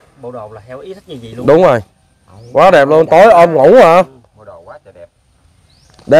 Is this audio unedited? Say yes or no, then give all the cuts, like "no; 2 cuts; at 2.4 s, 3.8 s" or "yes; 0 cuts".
yes; 0 cuts